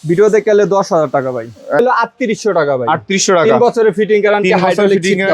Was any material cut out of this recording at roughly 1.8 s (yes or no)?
yes